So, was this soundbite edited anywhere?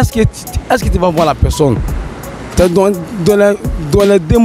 yes; 1 cut; at 1.9 s

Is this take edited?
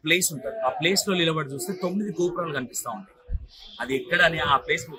no; 0 cuts

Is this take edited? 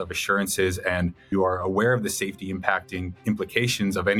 yes; 1 cut; at 1.2 s

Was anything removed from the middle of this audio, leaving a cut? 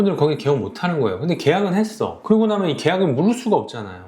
yes; 1 cut; at 2.2 s

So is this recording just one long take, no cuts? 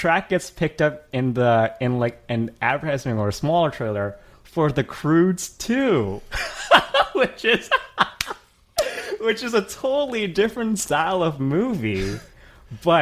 yes; 0 cuts

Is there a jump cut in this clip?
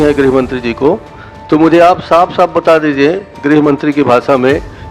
no; 0 cuts

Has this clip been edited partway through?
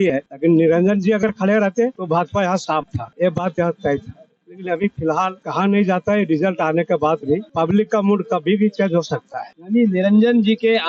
no; 0 cuts

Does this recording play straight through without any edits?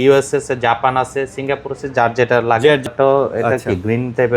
no; 1 cut; at 2.9 s

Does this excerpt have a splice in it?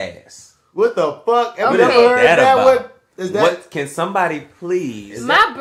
no; 0 cuts

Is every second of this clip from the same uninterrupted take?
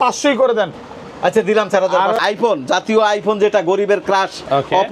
no; 1 cut; at 2.2 s

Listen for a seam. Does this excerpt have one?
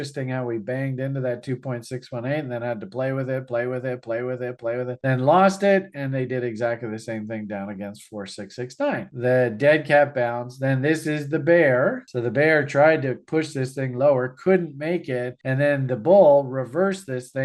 yes; 2 cuts; at 9.1 s, 12.1 s

